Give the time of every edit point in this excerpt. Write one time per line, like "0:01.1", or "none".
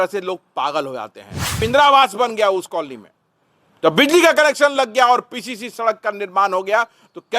0:01.6